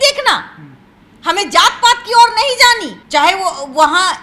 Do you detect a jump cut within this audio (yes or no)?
no